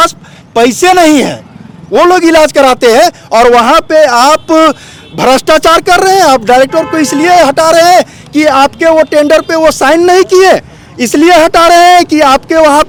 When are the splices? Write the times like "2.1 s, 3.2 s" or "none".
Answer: none